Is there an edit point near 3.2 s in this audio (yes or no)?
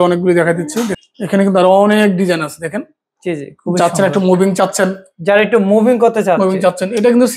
no